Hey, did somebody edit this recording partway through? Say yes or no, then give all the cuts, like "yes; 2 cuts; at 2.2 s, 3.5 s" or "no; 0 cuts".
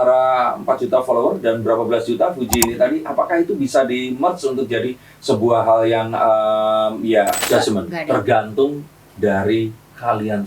yes; 1 cut; at 7.4 s